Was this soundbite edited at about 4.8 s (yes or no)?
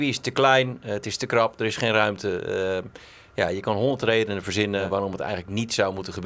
yes